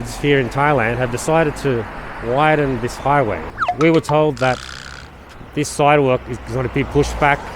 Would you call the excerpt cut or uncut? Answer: cut